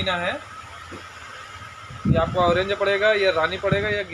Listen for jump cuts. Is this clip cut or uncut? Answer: uncut